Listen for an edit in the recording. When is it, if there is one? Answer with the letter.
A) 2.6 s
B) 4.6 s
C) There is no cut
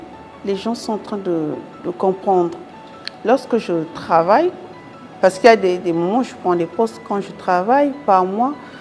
A